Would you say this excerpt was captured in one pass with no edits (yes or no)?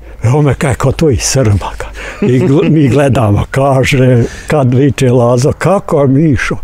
yes